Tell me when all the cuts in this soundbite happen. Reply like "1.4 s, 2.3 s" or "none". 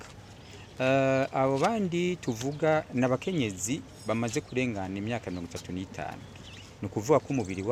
none

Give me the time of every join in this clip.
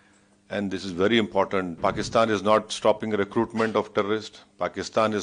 1.7 s

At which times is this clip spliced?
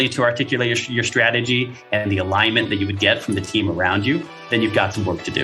4.5 s

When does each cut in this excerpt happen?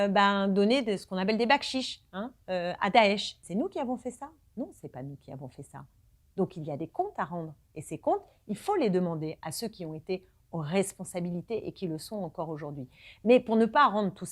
3.4 s

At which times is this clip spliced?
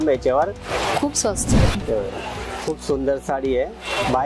1.7 s

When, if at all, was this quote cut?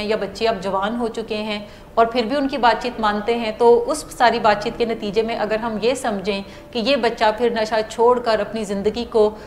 none

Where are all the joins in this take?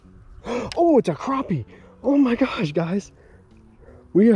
none

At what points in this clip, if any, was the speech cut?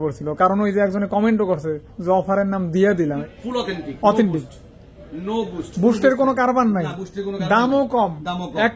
3.2 s

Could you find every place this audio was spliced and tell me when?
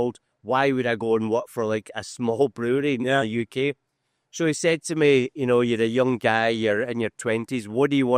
none

